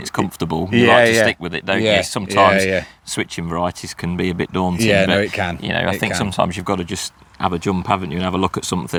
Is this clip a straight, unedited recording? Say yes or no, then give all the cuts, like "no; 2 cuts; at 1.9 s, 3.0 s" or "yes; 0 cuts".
yes; 0 cuts